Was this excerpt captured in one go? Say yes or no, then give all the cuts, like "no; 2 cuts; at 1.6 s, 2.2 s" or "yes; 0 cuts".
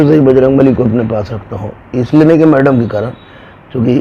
yes; 0 cuts